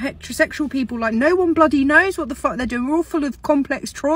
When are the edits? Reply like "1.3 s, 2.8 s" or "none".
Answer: none